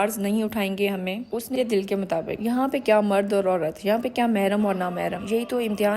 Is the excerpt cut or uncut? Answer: cut